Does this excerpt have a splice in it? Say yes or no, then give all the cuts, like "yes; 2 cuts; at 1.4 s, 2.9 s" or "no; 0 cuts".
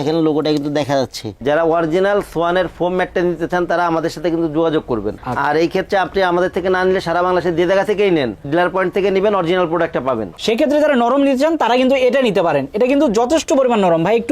yes; 2 cuts; at 1.3 s, 10.4 s